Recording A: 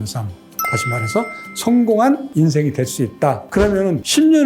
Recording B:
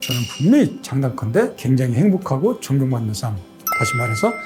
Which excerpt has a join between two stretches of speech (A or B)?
A